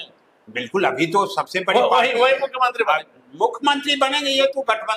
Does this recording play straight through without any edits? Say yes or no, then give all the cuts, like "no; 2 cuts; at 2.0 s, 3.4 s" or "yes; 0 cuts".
yes; 0 cuts